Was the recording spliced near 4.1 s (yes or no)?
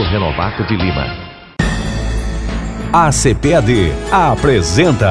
no